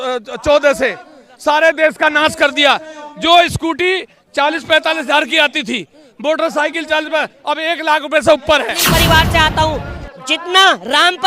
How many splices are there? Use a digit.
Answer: 1